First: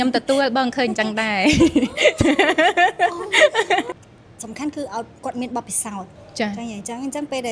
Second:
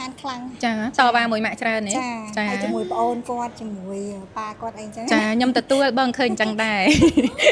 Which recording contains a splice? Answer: first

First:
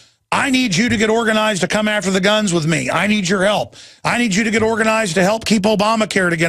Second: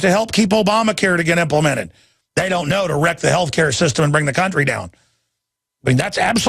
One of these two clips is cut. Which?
second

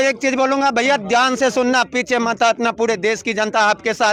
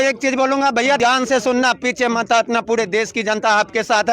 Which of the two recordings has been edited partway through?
second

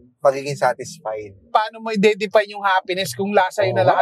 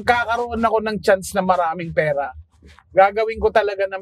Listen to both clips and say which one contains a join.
first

